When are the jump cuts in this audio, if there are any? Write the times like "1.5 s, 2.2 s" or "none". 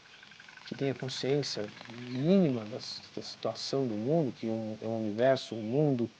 none